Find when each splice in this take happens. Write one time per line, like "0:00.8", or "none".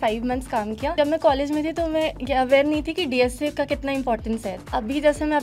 0:00.9
0:04.6